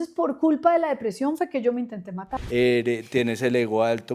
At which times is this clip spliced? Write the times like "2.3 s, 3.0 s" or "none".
2.3 s